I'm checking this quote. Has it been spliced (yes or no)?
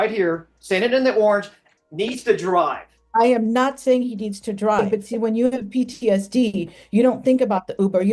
yes